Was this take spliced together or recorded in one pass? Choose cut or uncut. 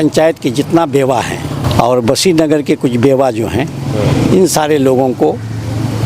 cut